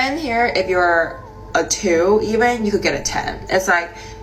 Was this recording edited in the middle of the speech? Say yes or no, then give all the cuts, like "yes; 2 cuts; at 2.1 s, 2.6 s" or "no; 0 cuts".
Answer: no; 0 cuts